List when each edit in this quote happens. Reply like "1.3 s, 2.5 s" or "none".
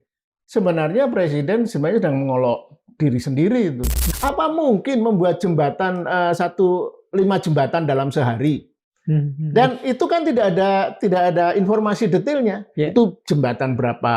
4.0 s